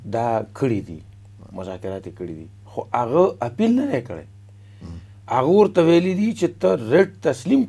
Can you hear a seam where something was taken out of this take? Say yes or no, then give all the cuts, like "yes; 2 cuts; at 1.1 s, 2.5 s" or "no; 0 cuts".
no; 0 cuts